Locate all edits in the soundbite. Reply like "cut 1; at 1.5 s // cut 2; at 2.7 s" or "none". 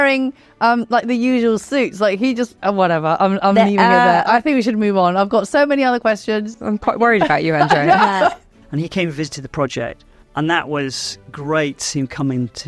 cut 1; at 2.6 s // cut 2; at 8.5 s // cut 3; at 10.1 s